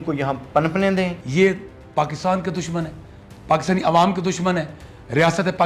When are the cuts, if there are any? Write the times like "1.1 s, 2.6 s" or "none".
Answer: 1.2 s